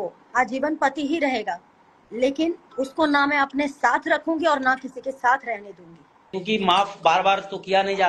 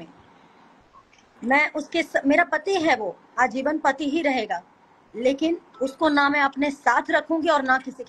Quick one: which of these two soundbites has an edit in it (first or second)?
first